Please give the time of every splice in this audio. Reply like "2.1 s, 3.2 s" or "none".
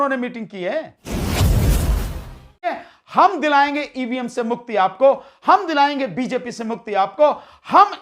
1.0 s, 2.7 s